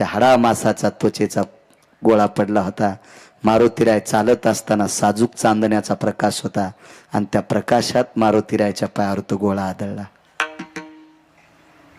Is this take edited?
yes; 1 cut; at 11.0 s

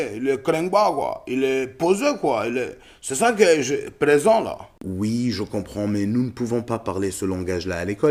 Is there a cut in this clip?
no; 0 cuts

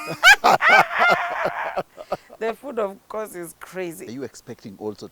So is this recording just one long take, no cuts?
no; 1 cut; at 4.1 s

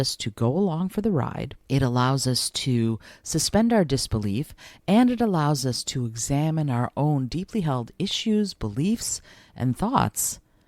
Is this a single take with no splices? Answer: no; 1 cut; at 1.5 s

